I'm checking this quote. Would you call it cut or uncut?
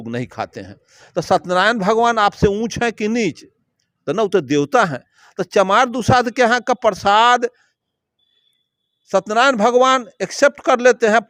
uncut